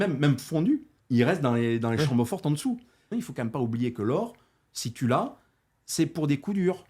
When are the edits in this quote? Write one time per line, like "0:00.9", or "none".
0:00.9
0:03.1